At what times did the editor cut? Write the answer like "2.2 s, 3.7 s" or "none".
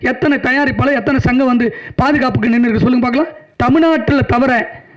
3.4 s